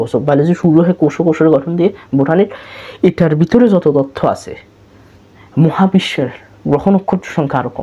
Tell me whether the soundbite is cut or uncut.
uncut